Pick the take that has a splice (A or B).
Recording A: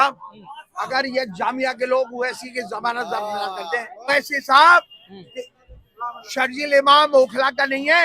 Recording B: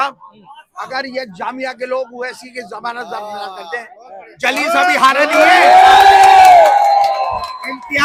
A